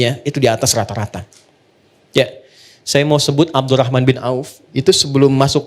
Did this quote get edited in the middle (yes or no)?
no